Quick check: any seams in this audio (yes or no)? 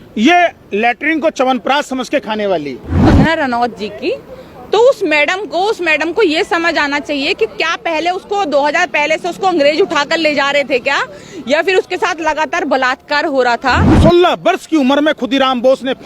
yes